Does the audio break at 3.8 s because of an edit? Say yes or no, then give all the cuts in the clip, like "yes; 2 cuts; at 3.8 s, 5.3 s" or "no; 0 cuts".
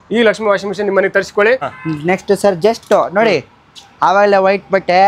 no; 1 cut; at 1.6 s